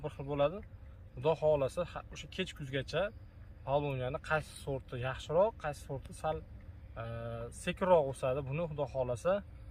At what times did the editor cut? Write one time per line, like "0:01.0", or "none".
none